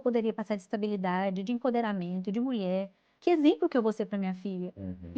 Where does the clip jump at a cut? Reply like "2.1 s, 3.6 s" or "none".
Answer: none